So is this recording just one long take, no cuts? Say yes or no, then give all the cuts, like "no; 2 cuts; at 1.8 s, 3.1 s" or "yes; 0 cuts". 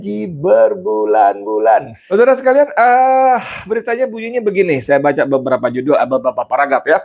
yes; 0 cuts